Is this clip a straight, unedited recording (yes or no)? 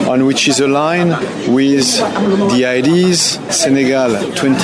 no